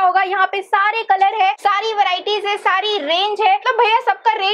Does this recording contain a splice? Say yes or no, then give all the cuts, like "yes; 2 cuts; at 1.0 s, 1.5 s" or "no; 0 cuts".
no; 0 cuts